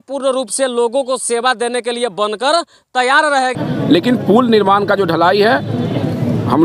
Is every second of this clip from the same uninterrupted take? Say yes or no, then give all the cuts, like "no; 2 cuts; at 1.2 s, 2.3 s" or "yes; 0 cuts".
yes; 0 cuts